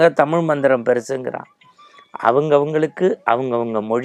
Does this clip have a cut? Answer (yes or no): no